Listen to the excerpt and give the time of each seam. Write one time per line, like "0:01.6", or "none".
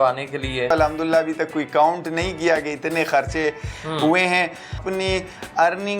0:00.7
0:04.8